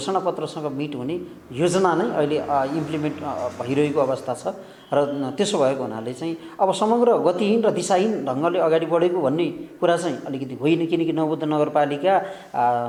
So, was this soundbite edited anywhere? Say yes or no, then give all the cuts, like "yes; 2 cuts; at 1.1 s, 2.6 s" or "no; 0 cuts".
no; 0 cuts